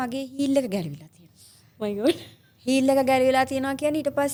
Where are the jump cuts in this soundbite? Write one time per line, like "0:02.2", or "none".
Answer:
none